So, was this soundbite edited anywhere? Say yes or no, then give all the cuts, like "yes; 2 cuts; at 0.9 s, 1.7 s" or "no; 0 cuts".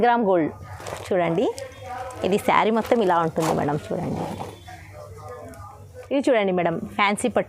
yes; 1 cut; at 5.9 s